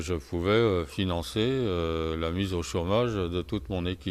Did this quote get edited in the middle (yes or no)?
yes